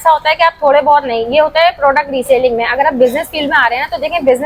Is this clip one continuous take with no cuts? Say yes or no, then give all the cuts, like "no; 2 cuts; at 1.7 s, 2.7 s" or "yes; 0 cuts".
yes; 0 cuts